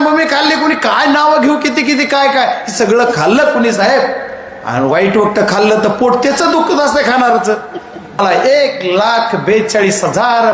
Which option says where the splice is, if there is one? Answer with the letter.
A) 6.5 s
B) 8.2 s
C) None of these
B